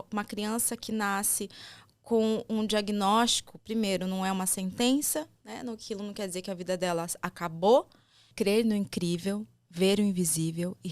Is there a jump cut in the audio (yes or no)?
yes